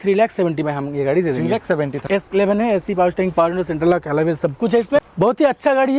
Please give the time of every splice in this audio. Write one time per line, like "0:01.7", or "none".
0:02.0
0:05.1